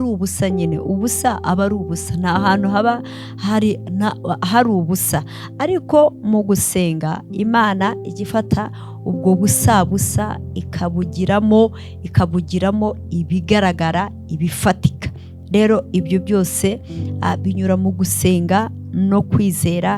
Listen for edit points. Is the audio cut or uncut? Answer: uncut